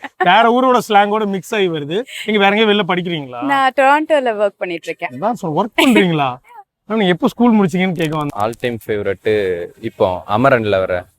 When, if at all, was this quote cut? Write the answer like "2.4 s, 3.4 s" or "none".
8.2 s

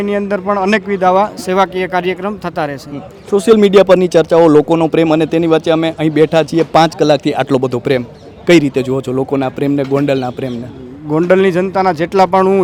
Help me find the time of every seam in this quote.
none

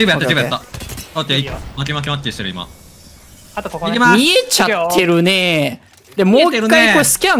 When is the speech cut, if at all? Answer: 1.4 s

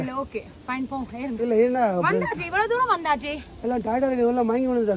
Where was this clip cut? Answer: none

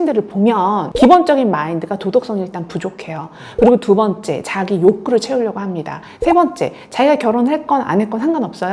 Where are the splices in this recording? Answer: none

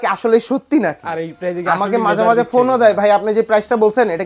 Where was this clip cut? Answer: none

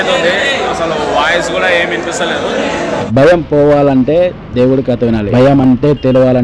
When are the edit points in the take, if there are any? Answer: 3.0 s, 5.2 s

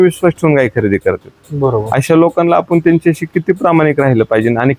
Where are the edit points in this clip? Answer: none

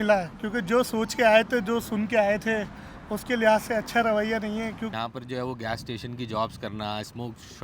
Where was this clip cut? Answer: 4.9 s

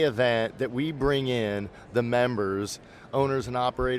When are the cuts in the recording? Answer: none

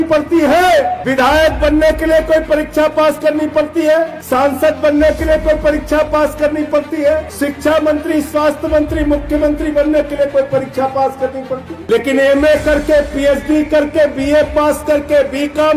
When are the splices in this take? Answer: 1.0 s, 4.2 s, 7.3 s, 11.7 s

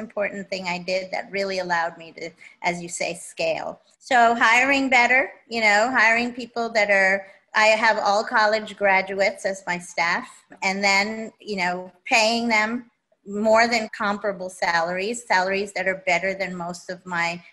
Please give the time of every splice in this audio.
3.9 s, 10.5 s, 13.9 s

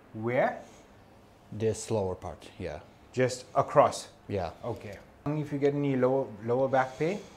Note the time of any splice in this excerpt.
5.3 s

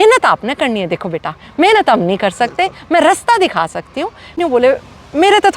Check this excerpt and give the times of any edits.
4.4 s

